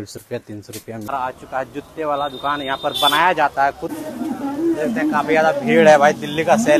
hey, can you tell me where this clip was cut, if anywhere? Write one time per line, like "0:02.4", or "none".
0:01.1
0:04.0